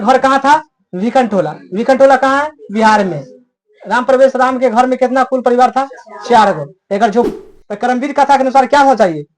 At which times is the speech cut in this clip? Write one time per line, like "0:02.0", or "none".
0:07.3